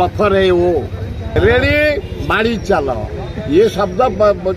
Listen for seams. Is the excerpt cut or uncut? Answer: cut